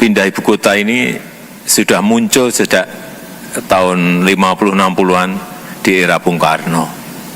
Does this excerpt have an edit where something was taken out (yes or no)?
no